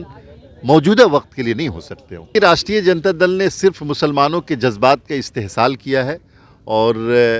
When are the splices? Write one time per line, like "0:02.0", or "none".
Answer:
0:02.3